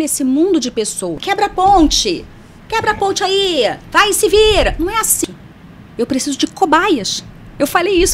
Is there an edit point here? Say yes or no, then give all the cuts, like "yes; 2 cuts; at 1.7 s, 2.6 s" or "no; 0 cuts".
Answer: yes; 2 cuts; at 1.2 s, 5.2 s